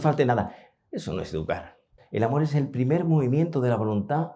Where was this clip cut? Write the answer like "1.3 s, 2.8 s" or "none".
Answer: 1.9 s